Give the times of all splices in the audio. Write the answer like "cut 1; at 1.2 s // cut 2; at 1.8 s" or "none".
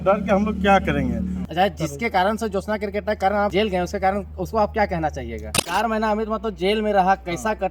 cut 1; at 1.4 s // cut 2; at 3.5 s // cut 3; at 5.7 s